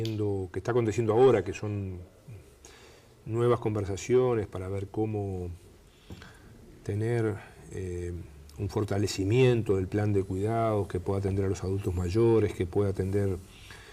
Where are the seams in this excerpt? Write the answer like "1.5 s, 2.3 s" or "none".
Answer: 4.4 s